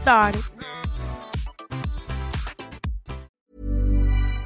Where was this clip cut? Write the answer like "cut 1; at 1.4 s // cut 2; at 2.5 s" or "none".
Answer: cut 1; at 3.3 s